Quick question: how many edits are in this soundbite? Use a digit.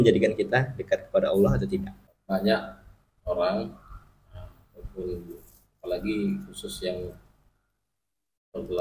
1